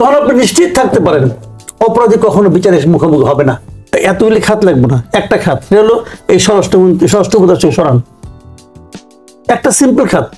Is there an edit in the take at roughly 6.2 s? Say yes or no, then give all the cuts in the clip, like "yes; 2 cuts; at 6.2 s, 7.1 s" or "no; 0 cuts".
no; 1 cut; at 3.9 s